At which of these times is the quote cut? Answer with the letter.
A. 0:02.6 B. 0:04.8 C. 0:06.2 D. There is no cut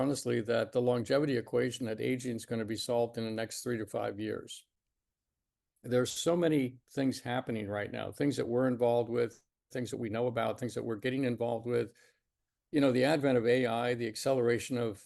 D